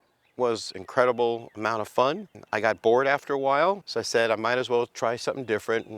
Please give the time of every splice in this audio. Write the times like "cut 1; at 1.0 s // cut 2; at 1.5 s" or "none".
cut 1; at 3.9 s